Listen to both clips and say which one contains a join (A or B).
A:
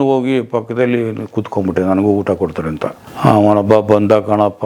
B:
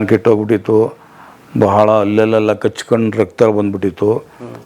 A